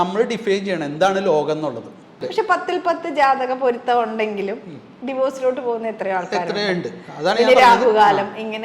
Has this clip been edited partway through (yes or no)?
yes